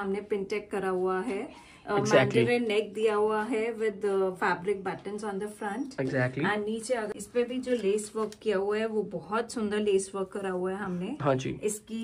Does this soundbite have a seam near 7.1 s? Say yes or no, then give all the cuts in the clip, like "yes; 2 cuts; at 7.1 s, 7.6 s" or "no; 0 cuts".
yes; 1 cut; at 7.1 s